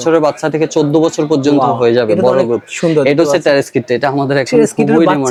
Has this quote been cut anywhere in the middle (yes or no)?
no